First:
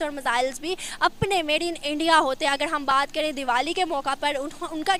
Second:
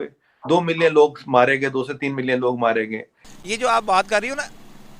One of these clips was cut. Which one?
second; 1 cut; at 3.4 s

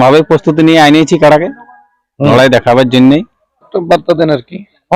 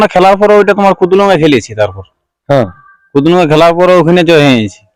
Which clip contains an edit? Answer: first; 1 cut; at 3.7 s

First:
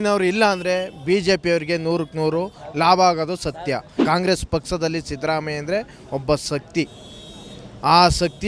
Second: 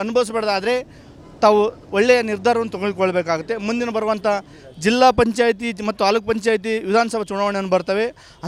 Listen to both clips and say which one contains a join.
first; 1 cut; at 3.9 s

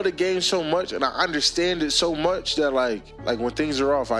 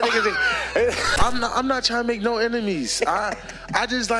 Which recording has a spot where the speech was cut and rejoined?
second; 1 cut; at 1.1 s

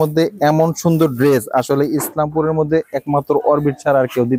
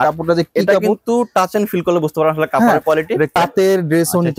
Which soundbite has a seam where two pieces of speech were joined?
second; 1 cut; at 3.3 s

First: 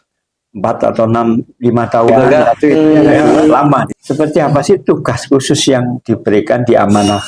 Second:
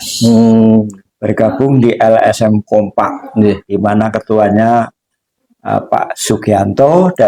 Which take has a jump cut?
first; 1 cut; at 3.9 s

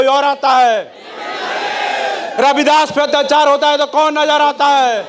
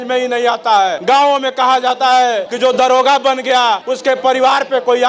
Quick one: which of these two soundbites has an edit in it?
second; 3 cuts; at 1.0 s, 2.5 s, 3.9 s

